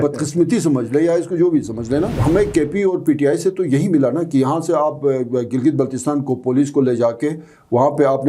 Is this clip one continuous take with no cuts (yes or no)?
no